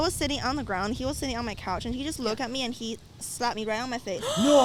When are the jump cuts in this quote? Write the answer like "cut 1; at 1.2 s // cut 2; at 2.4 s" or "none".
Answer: none